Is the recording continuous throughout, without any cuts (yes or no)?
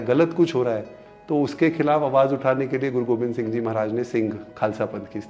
yes